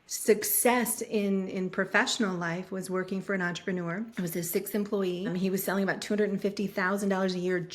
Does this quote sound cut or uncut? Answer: cut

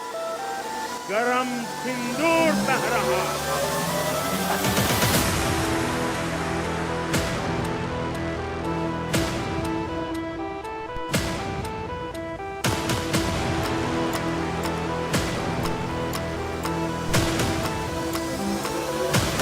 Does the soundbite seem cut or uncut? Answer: cut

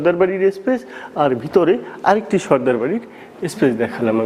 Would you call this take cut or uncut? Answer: uncut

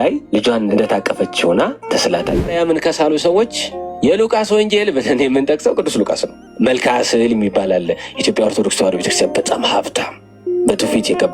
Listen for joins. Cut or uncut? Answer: cut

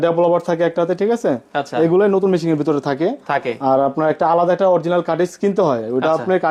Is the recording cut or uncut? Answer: uncut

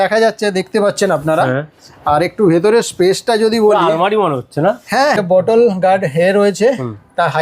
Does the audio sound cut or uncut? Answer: cut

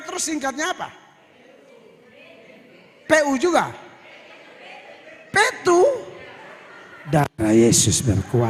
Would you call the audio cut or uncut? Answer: uncut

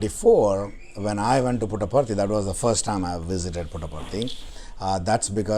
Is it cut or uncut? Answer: uncut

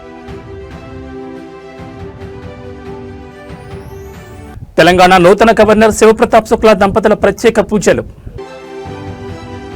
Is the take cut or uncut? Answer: cut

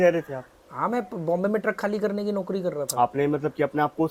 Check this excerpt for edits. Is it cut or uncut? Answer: uncut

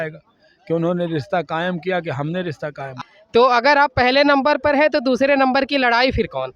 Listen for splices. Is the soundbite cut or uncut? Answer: cut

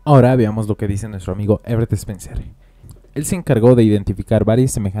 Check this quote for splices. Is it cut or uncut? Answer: uncut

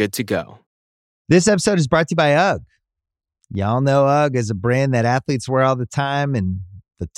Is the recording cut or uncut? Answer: cut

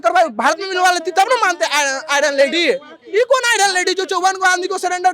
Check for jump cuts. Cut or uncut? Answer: uncut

